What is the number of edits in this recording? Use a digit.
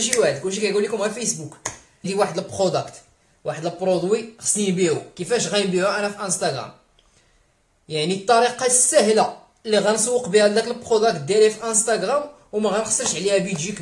1